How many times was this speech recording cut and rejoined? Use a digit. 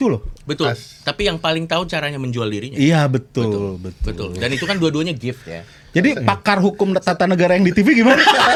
0